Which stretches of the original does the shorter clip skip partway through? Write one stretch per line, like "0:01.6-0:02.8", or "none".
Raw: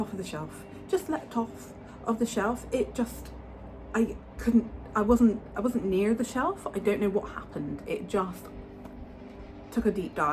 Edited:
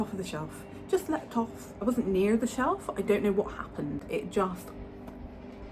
0:01.7-0:05.5